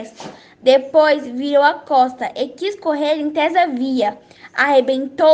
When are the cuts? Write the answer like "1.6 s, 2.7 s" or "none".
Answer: none